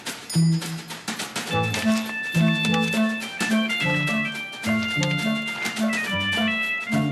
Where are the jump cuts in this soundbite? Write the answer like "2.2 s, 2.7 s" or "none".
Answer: none